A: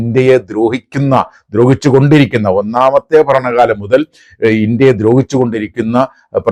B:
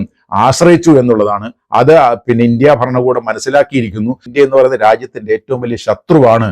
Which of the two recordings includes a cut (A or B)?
B